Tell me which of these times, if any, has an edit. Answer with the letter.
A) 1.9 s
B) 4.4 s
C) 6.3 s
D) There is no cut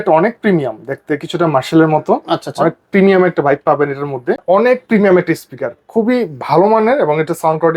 B